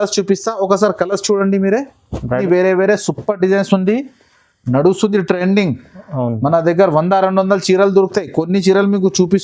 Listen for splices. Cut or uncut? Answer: cut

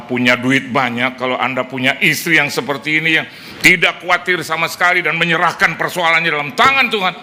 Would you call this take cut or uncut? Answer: uncut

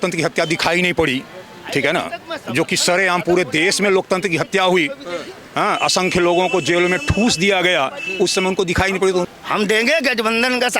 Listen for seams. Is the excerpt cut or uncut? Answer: cut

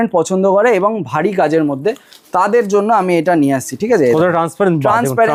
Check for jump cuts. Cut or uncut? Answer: uncut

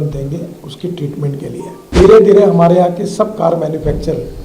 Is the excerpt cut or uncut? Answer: cut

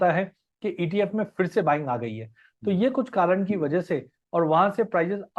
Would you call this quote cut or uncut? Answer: cut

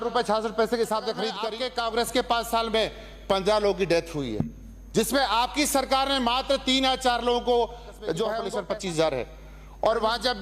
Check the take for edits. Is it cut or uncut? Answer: cut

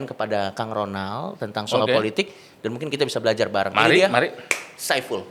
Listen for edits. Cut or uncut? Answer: uncut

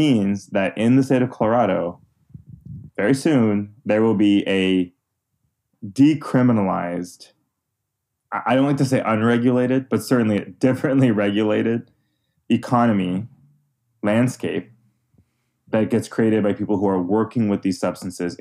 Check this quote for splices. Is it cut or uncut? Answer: cut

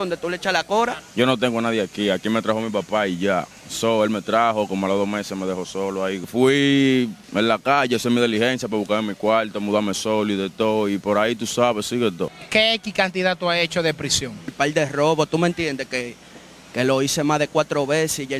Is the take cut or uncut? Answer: cut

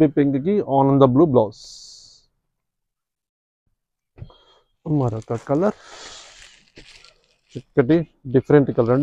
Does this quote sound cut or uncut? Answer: uncut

